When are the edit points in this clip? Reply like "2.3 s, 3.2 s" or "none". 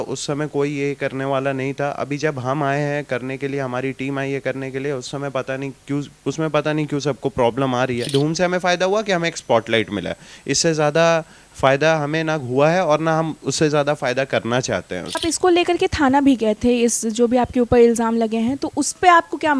8.1 s, 15.2 s